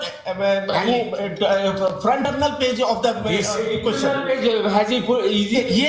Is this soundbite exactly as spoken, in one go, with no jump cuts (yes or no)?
no